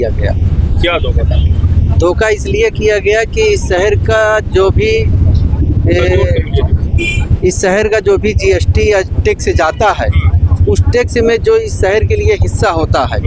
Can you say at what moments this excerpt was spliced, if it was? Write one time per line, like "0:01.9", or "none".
none